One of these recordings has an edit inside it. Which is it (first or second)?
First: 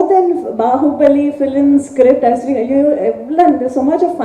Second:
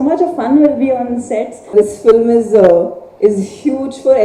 second